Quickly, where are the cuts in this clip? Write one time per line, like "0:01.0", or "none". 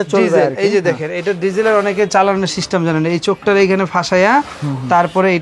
none